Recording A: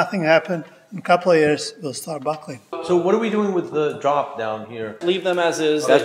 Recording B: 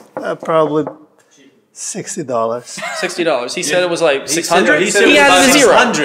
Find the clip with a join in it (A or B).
A